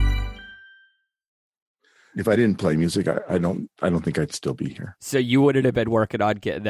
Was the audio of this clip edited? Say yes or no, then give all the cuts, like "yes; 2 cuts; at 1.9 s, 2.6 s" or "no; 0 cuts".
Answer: yes; 1 cut; at 1.7 s